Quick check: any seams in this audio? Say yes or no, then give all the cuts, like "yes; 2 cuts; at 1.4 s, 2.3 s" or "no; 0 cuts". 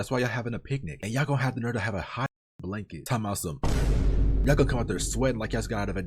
no; 0 cuts